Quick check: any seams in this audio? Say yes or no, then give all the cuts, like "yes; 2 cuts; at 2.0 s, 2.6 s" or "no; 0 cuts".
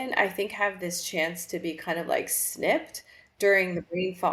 no; 0 cuts